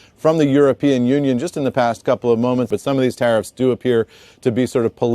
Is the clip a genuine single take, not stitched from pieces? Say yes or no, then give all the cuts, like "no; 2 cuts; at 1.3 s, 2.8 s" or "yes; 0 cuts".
no; 1 cut; at 2.7 s